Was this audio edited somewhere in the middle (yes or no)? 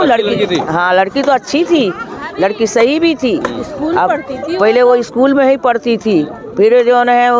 no